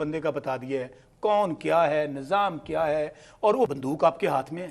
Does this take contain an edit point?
yes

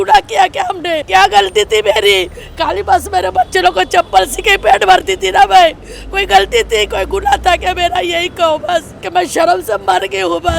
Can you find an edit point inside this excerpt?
yes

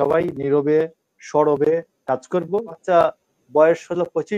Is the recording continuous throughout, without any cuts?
no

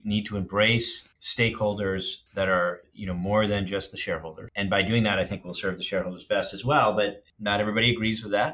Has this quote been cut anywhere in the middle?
yes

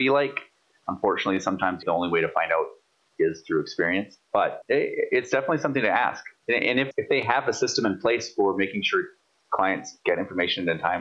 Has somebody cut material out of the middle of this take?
yes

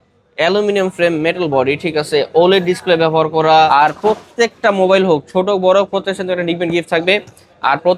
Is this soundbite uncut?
no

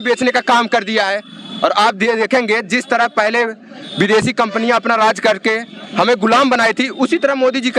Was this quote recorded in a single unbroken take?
yes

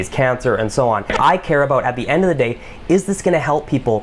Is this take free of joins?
yes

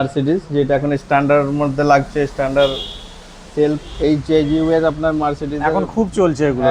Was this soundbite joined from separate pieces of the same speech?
yes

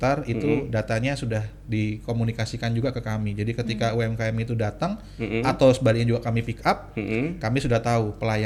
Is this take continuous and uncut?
yes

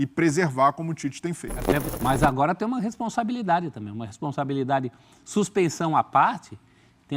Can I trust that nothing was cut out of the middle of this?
no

